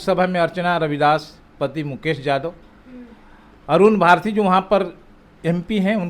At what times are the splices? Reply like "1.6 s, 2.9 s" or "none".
none